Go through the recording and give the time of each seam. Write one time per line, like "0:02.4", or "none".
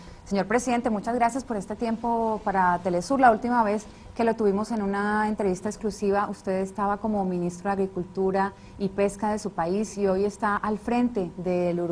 none